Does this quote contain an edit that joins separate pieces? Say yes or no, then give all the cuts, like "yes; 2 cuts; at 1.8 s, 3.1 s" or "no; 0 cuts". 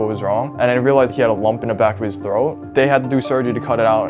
yes; 1 cut; at 1.1 s